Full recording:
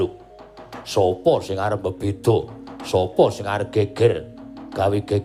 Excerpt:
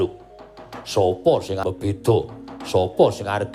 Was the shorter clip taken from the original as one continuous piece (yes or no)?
no